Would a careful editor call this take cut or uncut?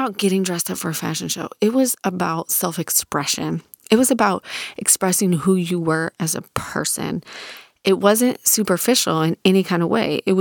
uncut